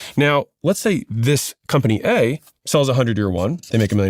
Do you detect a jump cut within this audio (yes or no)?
no